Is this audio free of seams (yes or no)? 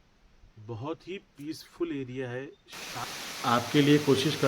no